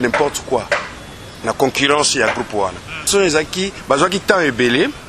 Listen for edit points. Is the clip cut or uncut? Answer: cut